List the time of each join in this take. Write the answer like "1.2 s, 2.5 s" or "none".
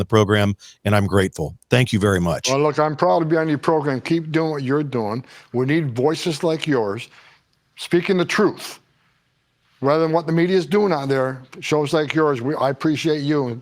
none